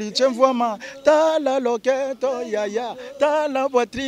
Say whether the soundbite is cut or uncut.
uncut